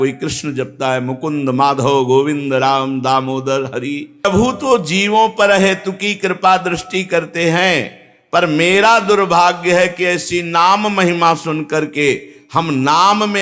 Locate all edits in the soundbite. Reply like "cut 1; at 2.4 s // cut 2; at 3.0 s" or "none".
cut 1; at 4.2 s